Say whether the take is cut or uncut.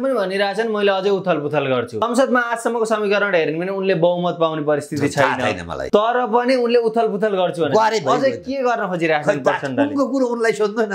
cut